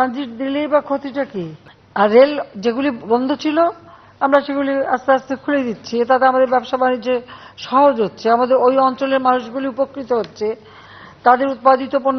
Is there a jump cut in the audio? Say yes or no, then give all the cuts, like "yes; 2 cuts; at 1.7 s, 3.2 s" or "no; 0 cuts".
no; 0 cuts